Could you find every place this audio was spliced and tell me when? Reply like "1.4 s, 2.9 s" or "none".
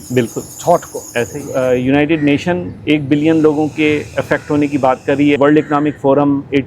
1.4 s, 5.4 s

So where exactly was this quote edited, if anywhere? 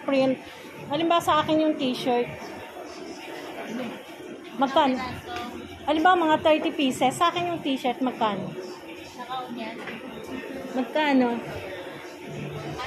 none

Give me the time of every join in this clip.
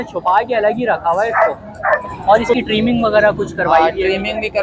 2.1 s

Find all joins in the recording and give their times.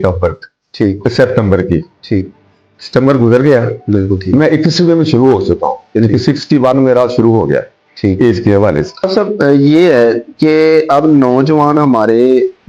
9.1 s

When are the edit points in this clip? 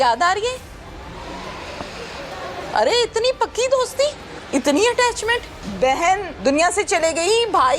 2.6 s, 4.3 s, 5.6 s, 6.3 s

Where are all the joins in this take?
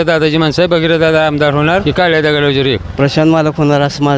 1.8 s, 2.9 s

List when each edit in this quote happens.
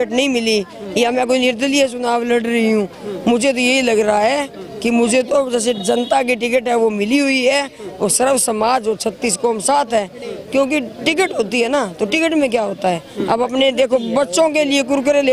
none

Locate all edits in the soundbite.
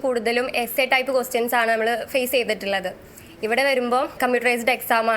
4.2 s

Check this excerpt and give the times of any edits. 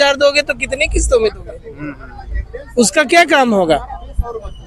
none

